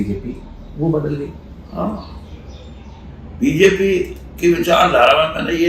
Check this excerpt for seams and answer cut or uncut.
uncut